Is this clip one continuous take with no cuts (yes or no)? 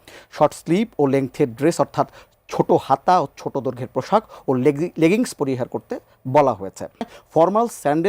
no